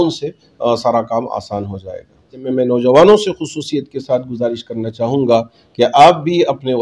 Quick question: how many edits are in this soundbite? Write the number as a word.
one